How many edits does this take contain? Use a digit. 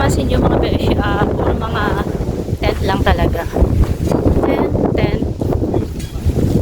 0